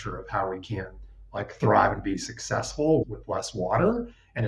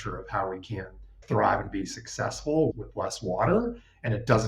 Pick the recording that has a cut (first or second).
second